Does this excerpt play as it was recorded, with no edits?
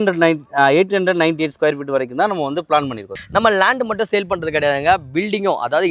no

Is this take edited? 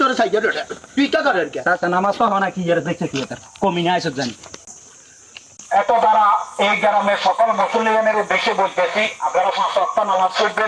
no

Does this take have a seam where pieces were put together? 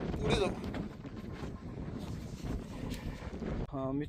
no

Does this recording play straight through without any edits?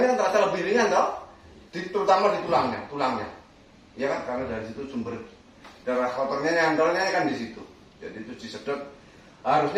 yes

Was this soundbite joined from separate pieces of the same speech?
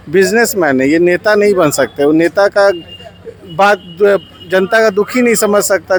no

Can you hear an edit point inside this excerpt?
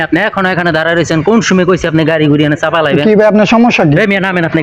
no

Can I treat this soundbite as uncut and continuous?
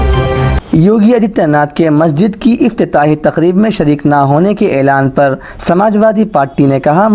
yes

